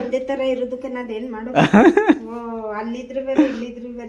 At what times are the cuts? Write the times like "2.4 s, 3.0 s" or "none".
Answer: none